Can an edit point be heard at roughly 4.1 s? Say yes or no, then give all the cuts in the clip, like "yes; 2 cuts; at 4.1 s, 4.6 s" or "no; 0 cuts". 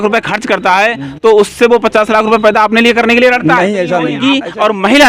yes; 1 cut; at 4.1 s